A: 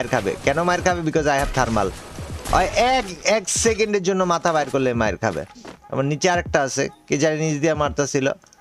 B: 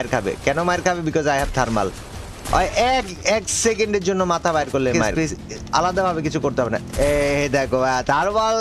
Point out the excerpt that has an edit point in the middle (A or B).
B